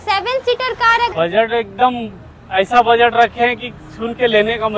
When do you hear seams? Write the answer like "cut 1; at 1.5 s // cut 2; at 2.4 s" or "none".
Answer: cut 1; at 1.1 s